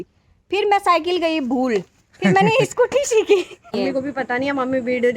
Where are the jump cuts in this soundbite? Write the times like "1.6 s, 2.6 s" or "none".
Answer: 1.9 s, 3.7 s